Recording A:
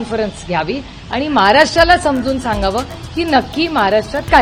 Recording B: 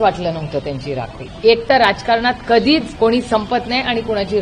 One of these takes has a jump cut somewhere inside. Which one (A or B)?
B